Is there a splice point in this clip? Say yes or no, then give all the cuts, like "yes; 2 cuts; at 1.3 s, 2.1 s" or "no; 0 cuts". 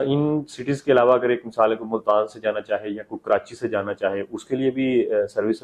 no; 0 cuts